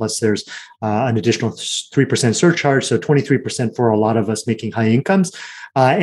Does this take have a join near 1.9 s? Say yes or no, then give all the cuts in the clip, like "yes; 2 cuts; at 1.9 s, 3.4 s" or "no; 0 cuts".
no; 0 cuts